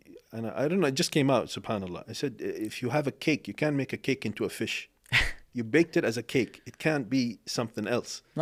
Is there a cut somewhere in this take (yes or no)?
no